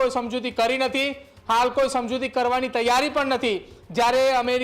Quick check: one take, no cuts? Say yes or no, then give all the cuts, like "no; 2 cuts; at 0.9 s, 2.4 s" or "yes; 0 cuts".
yes; 0 cuts